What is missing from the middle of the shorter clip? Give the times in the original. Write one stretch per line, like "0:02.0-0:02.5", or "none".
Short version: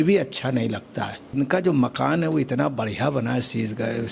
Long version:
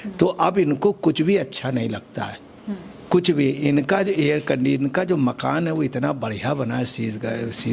0:02.5-0:04.8